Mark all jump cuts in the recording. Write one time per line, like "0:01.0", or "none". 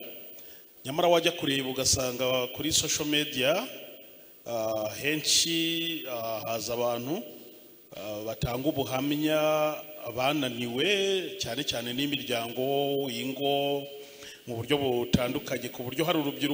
none